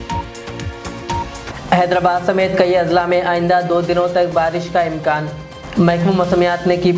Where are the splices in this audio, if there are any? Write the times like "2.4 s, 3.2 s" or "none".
1.4 s